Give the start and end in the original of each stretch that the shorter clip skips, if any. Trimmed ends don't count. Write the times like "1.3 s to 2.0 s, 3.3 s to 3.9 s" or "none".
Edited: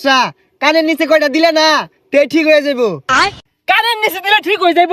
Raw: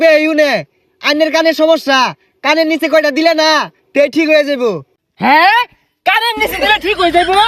5.1 s to 5.7 s